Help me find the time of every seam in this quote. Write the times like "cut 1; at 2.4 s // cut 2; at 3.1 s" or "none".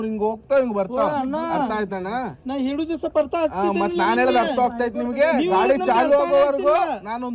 none